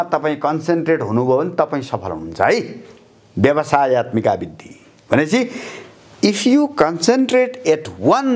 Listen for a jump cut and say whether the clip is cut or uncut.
uncut